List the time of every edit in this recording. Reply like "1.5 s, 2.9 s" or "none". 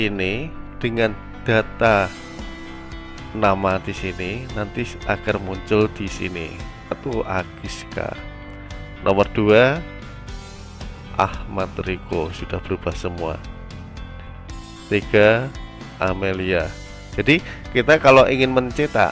7.0 s